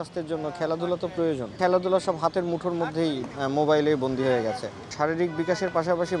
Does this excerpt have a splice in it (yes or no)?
yes